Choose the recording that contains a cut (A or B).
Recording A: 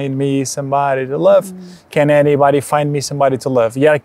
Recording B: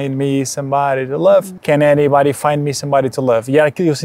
B